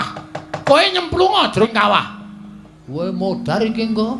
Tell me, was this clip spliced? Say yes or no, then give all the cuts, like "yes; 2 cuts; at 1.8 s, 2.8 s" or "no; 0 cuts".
yes; 1 cut; at 1.7 s